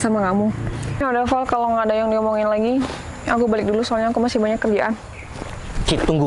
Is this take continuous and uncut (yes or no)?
no